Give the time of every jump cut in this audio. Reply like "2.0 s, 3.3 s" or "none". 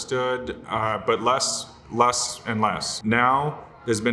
2.9 s